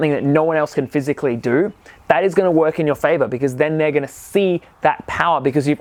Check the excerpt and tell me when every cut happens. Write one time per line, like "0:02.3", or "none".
none